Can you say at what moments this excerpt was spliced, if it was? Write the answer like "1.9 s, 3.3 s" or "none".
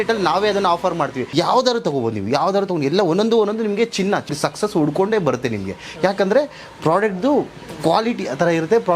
1.2 s, 4.3 s

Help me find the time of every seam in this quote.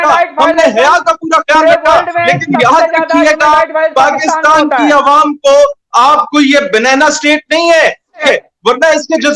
8.3 s

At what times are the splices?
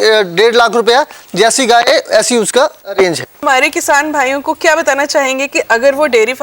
3.3 s

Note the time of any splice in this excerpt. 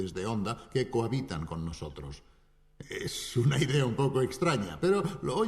2.0 s

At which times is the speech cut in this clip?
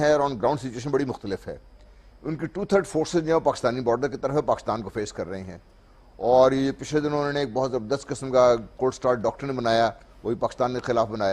7.5 s

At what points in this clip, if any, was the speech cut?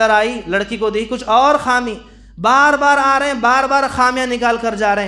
none

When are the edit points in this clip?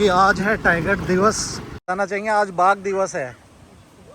1.8 s

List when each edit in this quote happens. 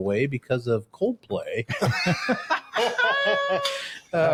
none

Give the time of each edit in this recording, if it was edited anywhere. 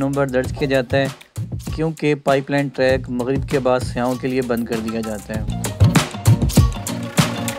5.6 s

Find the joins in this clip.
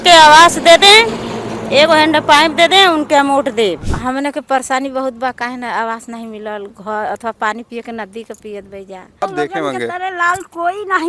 3.9 s, 9.2 s

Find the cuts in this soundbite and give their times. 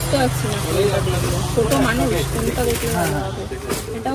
none

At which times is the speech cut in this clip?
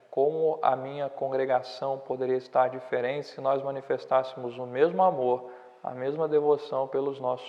none

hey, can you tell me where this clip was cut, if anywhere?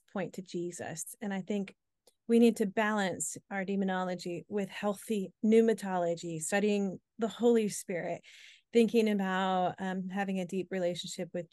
none

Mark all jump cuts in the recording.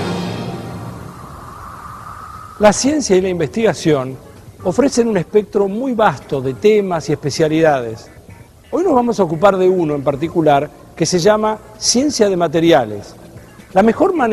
11.8 s

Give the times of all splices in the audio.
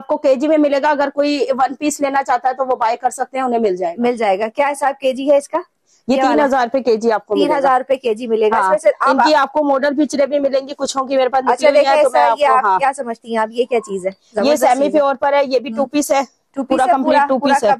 none

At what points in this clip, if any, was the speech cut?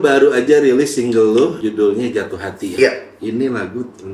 1.6 s, 3.1 s

